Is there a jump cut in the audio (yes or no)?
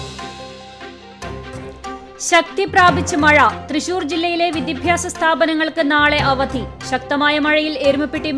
yes